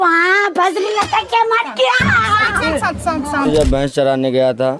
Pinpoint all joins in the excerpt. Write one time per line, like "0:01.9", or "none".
0:03.5